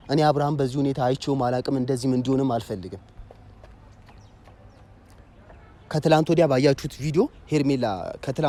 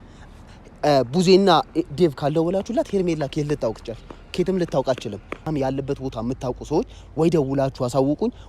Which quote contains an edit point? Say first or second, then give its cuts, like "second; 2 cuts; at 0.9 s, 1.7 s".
second; 1 cut; at 5.4 s